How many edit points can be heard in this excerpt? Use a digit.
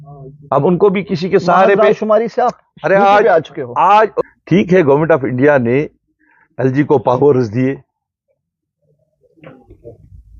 1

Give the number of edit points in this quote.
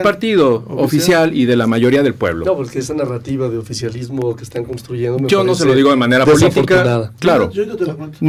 0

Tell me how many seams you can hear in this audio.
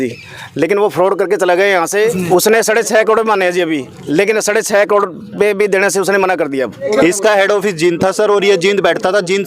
2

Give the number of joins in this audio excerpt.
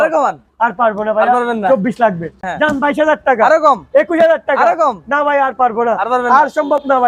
1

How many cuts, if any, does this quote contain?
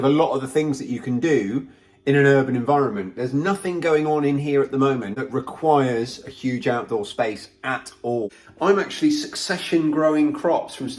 2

